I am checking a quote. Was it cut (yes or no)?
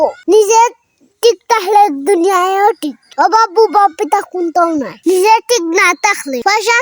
no